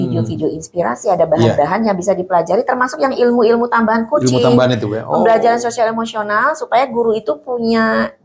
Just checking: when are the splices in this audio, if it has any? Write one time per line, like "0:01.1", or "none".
none